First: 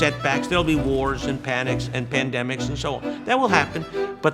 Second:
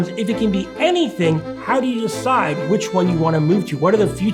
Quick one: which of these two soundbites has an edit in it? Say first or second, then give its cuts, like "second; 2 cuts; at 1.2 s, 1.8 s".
second; 1 cut; at 1.5 s